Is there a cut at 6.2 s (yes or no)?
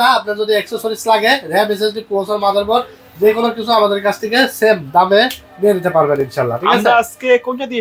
no